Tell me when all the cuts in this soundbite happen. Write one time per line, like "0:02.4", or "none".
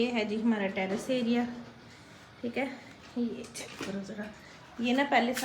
none